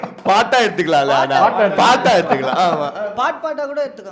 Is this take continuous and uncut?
yes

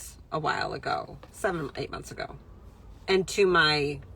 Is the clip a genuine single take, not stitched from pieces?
yes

